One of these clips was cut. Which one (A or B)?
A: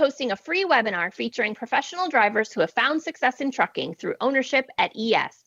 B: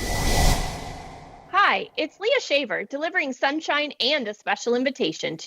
B